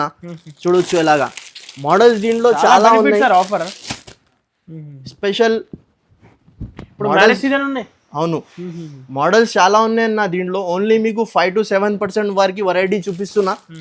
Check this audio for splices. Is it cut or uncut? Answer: uncut